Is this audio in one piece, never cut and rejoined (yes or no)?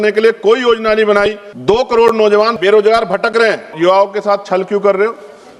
no